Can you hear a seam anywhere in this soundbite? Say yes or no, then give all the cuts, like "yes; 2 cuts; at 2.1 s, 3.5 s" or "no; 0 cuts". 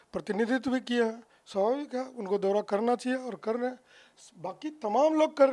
no; 0 cuts